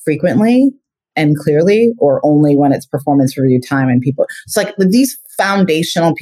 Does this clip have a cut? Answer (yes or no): no